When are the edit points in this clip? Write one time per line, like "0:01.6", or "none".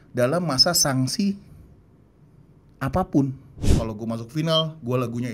0:03.7